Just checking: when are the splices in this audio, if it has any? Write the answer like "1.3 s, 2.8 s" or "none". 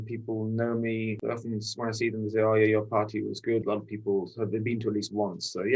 3.6 s